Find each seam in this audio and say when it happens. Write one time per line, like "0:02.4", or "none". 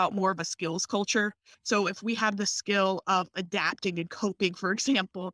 0:01.5